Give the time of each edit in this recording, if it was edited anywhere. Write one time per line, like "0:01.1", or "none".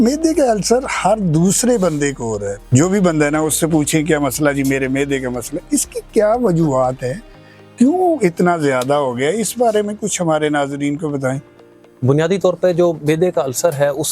none